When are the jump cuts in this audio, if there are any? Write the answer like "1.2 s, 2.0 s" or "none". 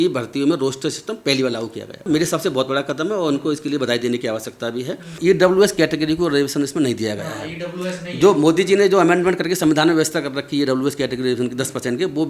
2.0 s, 5.2 s

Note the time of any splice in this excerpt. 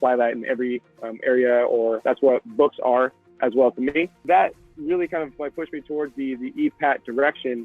2.0 s, 4.2 s

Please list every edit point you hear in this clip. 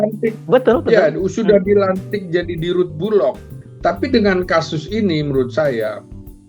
3.5 s

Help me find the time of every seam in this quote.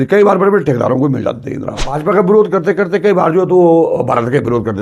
1.9 s

